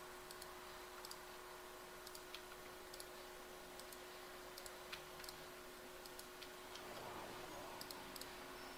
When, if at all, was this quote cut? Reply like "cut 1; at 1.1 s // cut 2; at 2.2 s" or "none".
none